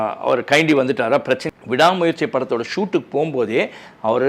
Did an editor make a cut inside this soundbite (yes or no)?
yes